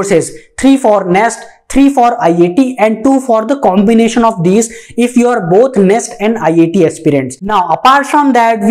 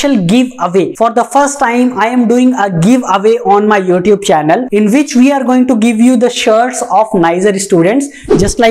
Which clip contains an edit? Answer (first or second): first